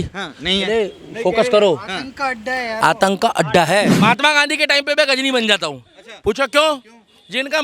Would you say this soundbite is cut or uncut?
cut